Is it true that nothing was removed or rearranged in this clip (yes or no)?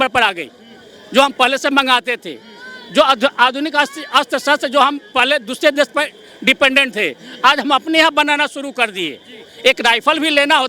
yes